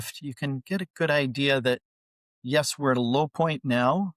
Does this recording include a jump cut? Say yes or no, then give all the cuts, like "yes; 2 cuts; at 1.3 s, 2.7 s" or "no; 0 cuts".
no; 0 cuts